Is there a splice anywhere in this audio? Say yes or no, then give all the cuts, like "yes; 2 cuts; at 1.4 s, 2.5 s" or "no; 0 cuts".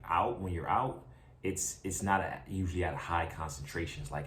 no; 0 cuts